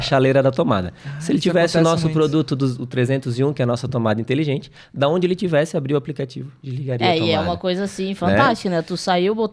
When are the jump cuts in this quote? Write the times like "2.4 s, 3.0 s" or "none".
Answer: none